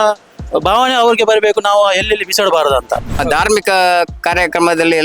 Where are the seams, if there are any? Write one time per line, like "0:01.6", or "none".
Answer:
0:03.2

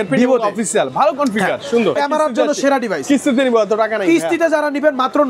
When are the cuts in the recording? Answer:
0:02.0

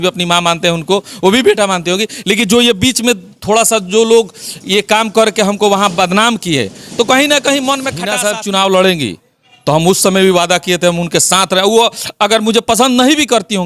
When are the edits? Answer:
0:08.0

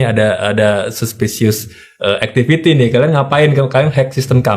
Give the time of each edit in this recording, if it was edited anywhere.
none

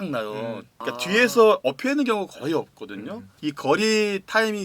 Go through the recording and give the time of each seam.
0:03.2

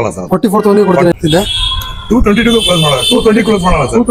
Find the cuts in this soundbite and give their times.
0:01.1

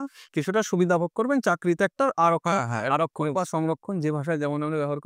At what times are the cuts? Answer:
none

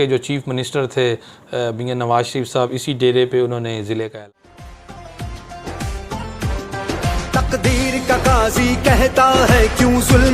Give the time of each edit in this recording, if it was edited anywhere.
0:04.2

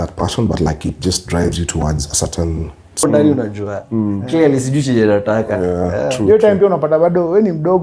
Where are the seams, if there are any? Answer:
0:03.0

